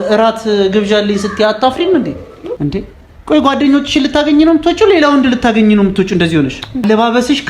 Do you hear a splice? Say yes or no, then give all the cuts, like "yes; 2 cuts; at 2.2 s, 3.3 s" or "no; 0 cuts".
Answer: yes; 2 cuts; at 2.4 s, 6.8 s